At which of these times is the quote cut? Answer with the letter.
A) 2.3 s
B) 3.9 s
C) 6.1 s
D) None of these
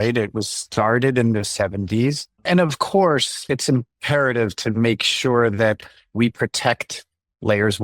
A